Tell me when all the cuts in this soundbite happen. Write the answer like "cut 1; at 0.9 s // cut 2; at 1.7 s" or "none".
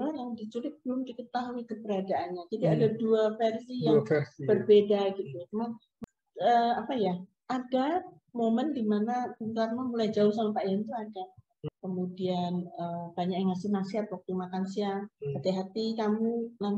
cut 1; at 6.0 s // cut 2; at 11.6 s